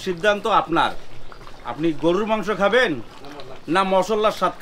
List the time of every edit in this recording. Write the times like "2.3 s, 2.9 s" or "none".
none